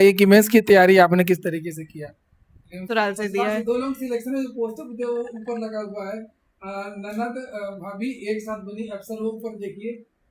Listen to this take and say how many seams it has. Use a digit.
1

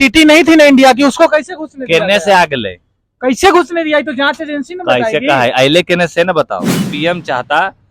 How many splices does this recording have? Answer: 1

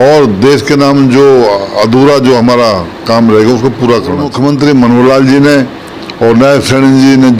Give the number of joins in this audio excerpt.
1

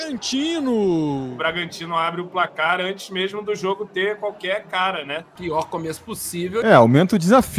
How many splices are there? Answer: 3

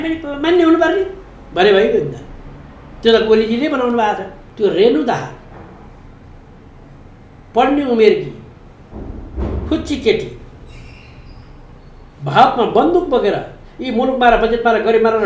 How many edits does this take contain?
1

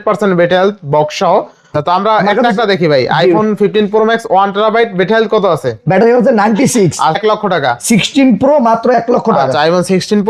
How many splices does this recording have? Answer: 2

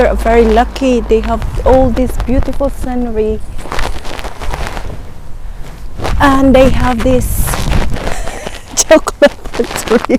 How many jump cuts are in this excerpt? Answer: 0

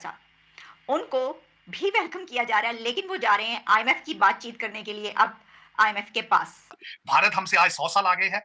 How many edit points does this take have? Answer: 1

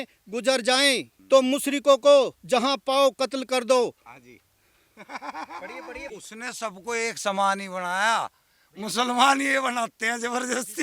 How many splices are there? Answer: 2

